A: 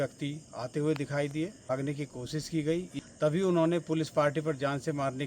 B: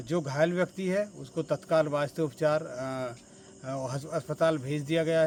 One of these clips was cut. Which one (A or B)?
A